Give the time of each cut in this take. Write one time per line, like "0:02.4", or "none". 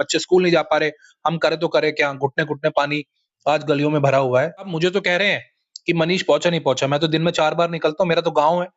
0:04.7